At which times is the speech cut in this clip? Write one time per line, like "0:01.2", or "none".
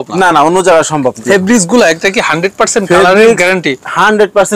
0:01.2